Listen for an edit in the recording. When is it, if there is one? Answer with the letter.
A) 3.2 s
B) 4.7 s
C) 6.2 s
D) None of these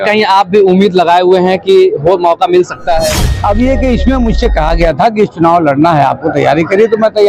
A